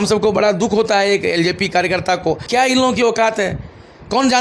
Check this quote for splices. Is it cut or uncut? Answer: cut